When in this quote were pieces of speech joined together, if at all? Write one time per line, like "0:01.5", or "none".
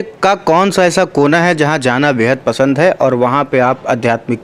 none